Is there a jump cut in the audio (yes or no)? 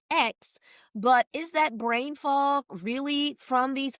no